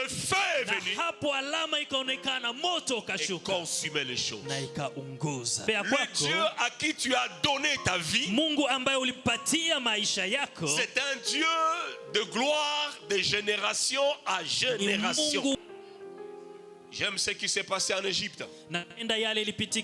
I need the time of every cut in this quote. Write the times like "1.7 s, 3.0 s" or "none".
5.6 s, 15.6 s